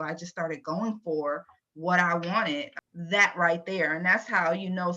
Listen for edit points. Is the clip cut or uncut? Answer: cut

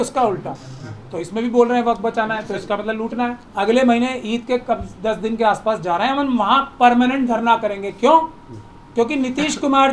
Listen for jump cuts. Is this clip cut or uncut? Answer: cut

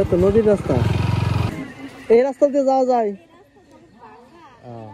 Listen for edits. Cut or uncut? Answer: uncut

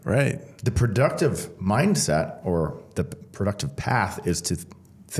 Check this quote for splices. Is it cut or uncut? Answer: uncut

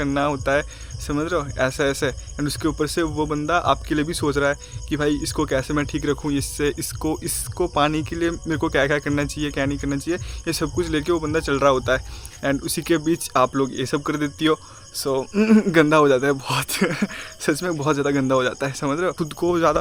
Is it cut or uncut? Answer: cut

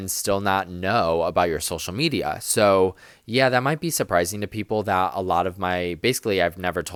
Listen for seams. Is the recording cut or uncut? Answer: uncut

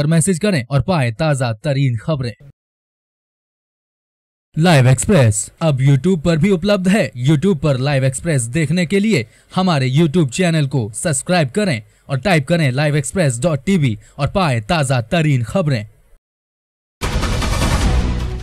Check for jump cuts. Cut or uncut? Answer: cut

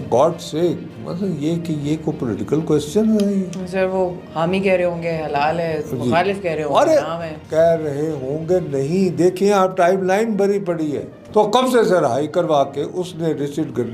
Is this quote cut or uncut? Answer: cut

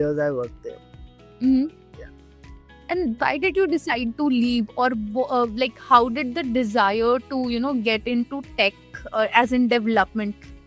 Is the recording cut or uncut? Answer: uncut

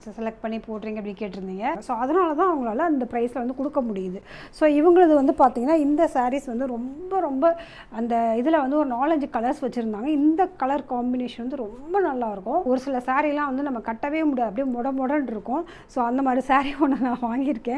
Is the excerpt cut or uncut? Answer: cut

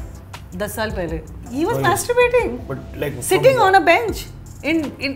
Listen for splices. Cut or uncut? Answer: uncut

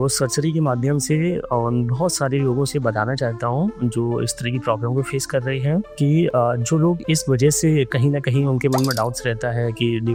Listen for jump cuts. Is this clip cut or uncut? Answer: uncut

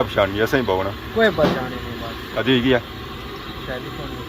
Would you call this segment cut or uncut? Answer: cut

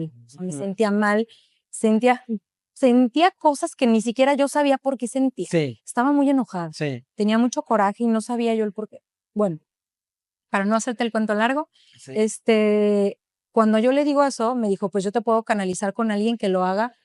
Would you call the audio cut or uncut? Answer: uncut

